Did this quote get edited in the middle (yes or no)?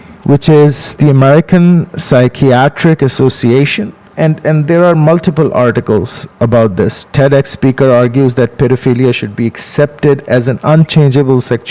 yes